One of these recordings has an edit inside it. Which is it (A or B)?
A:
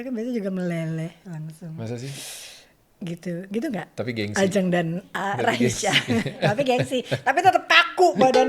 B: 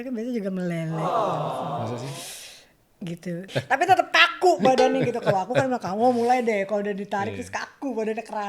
B